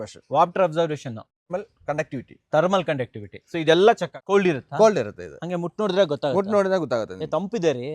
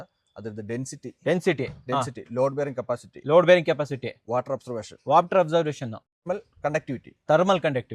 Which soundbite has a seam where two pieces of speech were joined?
first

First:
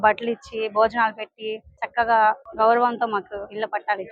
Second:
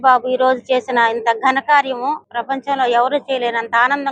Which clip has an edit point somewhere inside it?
second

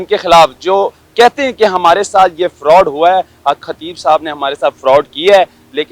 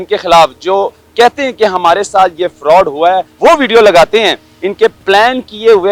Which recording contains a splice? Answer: second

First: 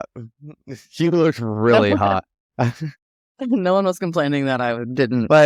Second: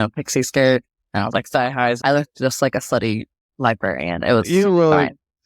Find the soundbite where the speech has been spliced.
second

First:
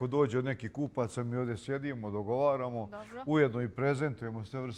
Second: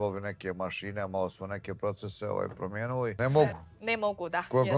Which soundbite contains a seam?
second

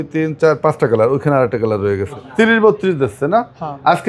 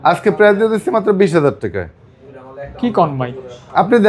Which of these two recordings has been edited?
first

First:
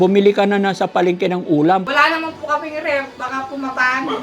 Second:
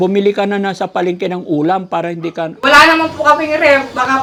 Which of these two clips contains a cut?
first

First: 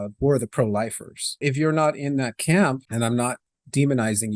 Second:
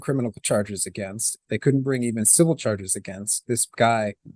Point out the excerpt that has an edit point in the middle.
first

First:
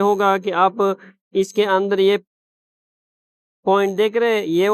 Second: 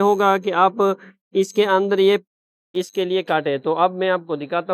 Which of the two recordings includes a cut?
second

